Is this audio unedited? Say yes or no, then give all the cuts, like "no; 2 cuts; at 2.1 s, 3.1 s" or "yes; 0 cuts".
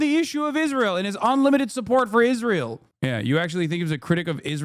no; 1 cut; at 2.8 s